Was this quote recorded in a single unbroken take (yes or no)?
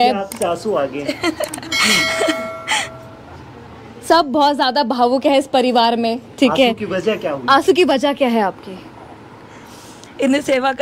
yes